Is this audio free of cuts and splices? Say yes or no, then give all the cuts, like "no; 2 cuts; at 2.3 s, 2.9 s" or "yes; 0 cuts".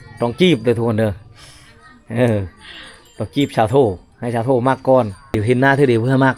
no; 1 cut; at 5.4 s